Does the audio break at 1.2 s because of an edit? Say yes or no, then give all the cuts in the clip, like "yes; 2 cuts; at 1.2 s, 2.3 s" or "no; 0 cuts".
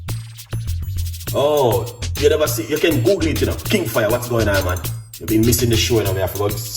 yes; 1 cut; at 1.2 s